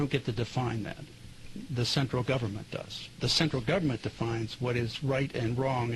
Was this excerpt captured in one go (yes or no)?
no